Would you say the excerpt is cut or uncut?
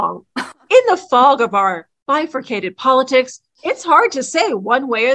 cut